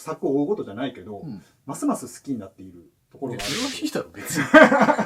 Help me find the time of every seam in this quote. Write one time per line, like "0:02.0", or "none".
none